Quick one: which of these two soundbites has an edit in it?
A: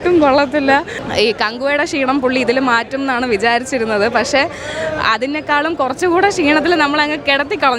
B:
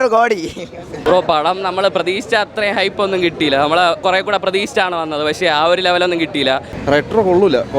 B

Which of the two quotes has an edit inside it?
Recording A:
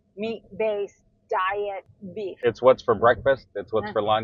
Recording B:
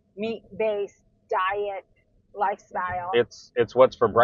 A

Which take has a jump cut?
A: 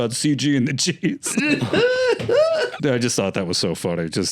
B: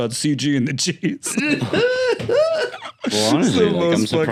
A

